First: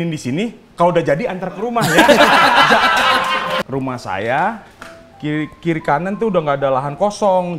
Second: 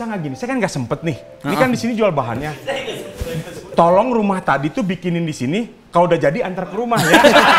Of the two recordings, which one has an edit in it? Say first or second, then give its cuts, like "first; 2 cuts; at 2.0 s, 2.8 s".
first; 1 cut; at 3.4 s